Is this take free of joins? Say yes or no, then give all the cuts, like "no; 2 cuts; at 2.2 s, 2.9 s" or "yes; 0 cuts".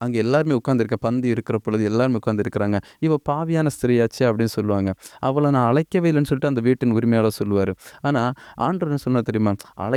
yes; 0 cuts